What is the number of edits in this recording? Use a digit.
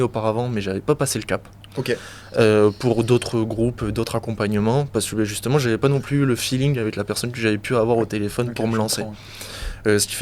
0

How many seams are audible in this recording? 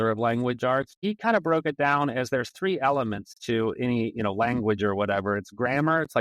1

